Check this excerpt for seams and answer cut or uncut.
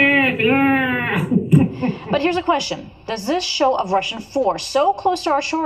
cut